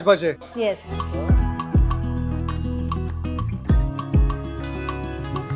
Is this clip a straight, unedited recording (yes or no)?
yes